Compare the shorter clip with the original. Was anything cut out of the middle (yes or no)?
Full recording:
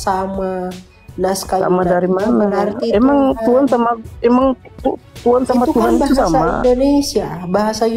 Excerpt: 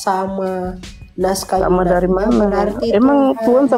no